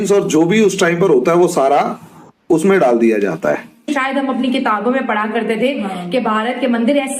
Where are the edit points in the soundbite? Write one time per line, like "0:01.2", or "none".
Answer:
0:03.9